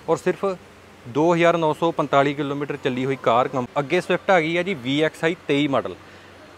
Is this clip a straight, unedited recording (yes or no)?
no